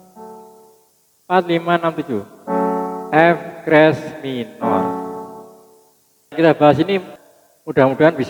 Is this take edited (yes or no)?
yes